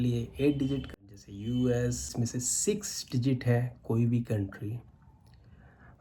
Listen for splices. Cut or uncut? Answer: cut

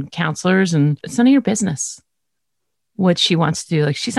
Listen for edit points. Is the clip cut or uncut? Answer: cut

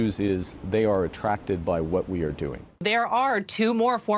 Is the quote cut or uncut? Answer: cut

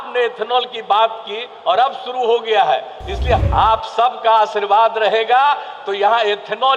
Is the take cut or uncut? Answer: cut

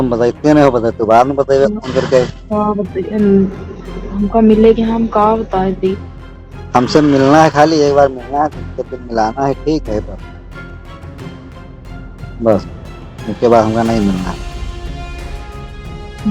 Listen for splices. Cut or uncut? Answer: uncut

